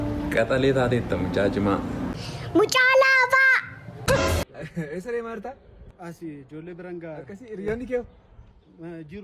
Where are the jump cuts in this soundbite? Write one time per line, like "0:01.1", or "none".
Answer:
0:04.4